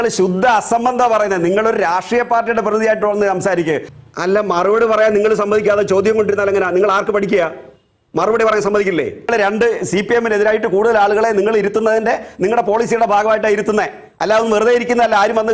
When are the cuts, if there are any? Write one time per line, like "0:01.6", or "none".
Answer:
0:03.9
0:09.3